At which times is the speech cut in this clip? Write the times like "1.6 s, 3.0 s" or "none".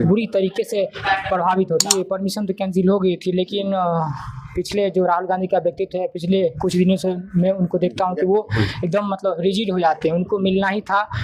1.9 s